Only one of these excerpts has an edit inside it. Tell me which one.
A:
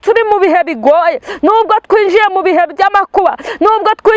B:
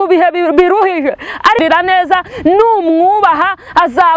B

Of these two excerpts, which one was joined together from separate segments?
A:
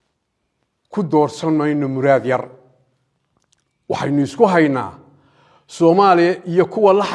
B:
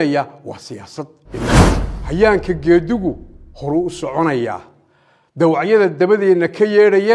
B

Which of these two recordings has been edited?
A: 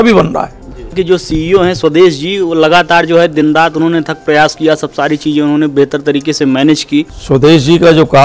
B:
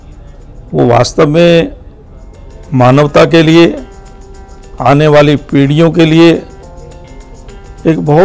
A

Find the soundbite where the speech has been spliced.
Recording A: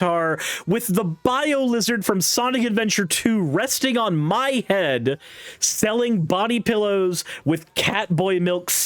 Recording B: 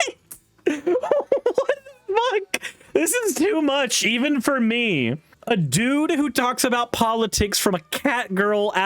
B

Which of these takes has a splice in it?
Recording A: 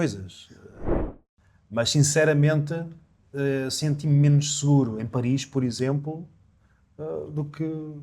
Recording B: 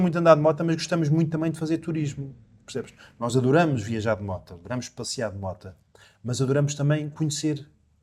A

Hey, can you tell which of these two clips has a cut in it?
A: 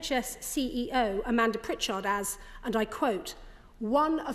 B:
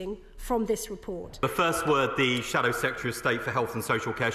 B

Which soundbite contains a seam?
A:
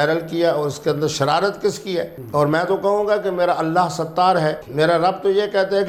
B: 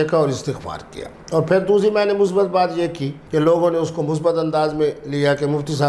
B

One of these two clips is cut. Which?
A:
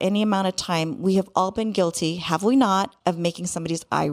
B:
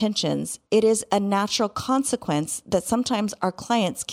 A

